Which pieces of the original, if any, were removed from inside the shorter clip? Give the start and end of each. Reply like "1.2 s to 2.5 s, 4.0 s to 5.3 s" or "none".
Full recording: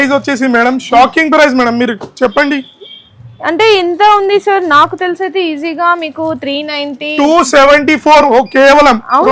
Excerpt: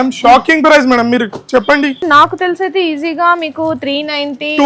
2.7 s to 4.6 s